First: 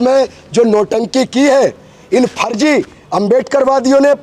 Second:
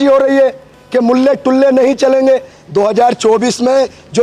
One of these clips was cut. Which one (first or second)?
second